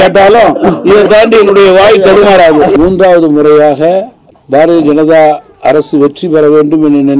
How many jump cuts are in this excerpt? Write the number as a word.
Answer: one